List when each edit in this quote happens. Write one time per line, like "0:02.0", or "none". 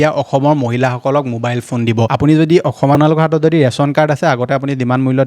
0:02.1
0:02.9